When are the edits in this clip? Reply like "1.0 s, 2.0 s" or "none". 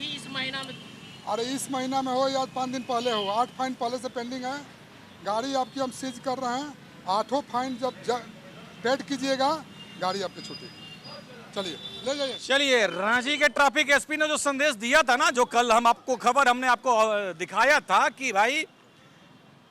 none

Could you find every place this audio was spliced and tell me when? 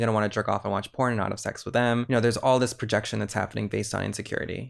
2.1 s

